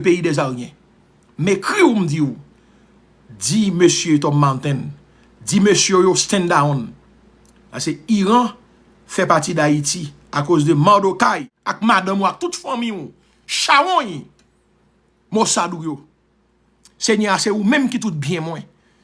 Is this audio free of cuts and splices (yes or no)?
no